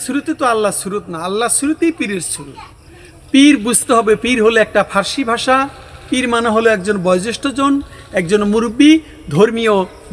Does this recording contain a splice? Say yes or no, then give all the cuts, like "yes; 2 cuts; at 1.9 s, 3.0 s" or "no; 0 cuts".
no; 0 cuts